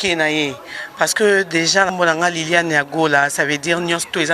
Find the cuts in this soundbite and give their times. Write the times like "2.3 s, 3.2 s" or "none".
1.9 s